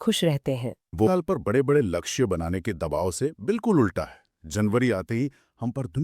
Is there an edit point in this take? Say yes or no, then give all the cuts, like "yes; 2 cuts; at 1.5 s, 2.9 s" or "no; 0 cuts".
yes; 1 cut; at 1.1 s